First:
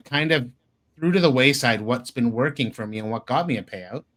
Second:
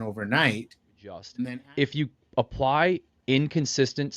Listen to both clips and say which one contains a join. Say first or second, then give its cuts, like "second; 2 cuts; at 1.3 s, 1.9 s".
second; 1 cut; at 1.3 s